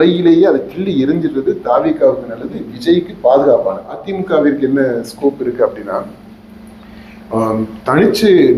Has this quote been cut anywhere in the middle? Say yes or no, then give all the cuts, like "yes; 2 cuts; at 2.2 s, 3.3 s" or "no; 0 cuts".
yes; 1 cut; at 4.1 s